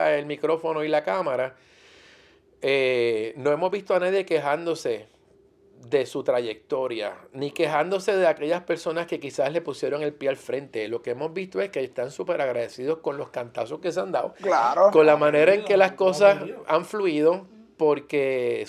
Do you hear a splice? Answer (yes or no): no